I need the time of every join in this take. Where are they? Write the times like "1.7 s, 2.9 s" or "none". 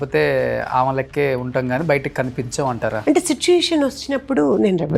3.0 s